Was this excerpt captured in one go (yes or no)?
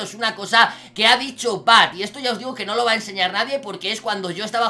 yes